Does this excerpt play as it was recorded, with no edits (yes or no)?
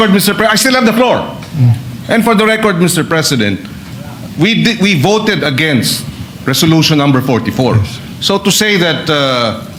yes